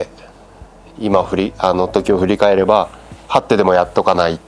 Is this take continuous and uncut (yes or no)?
yes